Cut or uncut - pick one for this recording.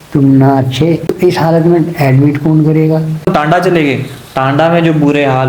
cut